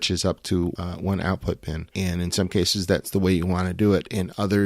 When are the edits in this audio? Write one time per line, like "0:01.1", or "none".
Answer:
0:00.7
0:01.8